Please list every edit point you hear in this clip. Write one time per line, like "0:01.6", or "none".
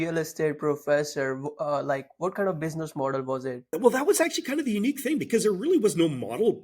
0:03.7